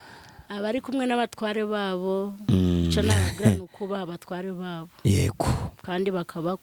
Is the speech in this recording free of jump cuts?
yes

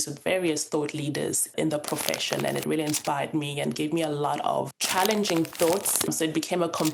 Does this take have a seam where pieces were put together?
yes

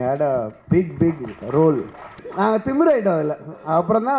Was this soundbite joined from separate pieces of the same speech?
yes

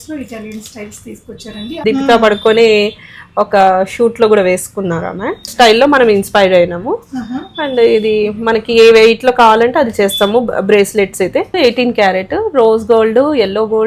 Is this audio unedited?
no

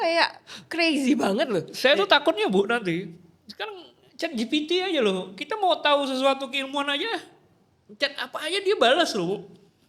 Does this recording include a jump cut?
no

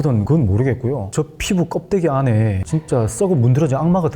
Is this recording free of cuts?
yes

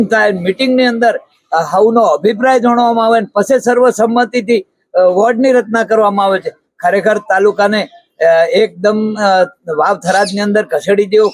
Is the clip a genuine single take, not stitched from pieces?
yes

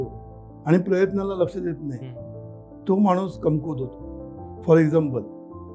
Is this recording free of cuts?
yes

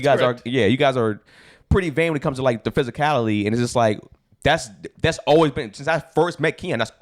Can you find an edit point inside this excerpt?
no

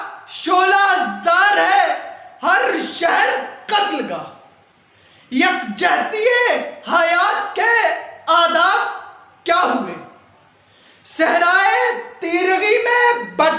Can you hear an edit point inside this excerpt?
no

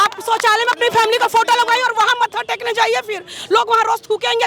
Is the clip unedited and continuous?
yes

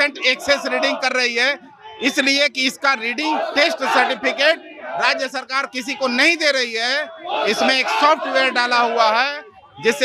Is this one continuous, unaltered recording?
yes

